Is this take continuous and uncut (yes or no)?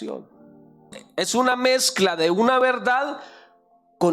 no